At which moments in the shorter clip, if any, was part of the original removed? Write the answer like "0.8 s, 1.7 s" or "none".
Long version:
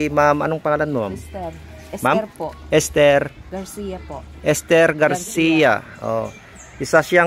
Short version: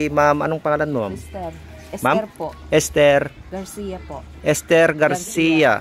none